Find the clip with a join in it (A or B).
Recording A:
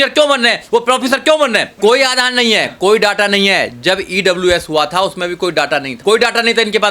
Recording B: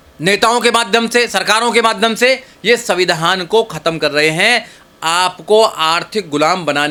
A